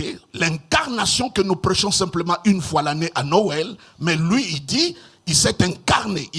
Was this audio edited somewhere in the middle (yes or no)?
no